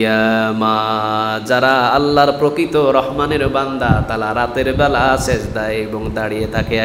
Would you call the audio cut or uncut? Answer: uncut